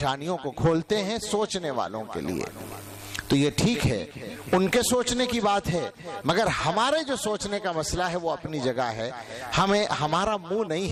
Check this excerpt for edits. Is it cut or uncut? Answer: uncut